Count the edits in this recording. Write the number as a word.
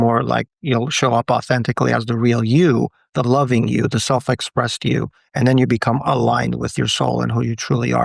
one